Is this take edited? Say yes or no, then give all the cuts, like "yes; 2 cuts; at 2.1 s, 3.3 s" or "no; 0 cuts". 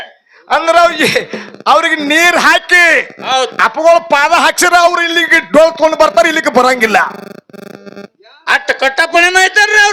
no; 0 cuts